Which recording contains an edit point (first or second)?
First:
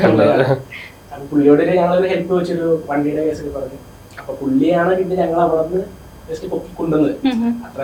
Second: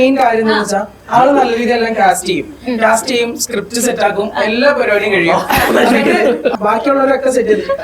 second